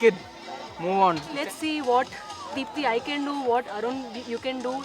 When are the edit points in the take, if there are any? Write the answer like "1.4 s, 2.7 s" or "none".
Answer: 1.3 s